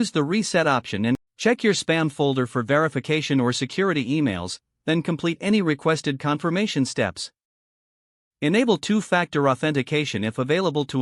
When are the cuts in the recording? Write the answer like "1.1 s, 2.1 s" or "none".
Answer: 1.2 s